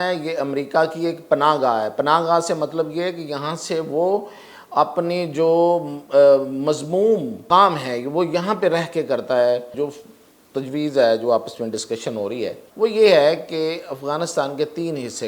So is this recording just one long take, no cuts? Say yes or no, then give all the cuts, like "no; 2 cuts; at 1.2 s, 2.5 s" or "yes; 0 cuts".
no; 3 cuts; at 7.4 s, 9.7 s, 12.6 s